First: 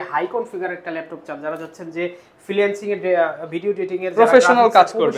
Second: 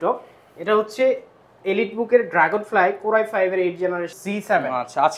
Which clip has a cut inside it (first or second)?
second